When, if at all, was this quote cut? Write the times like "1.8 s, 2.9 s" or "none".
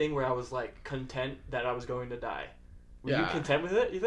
none